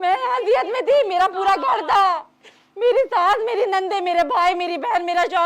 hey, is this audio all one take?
yes; 0 cuts

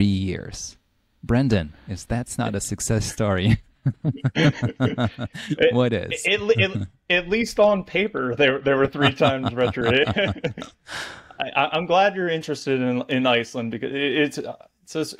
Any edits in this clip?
no; 0 cuts

